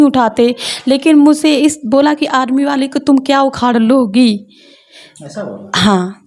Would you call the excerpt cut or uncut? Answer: uncut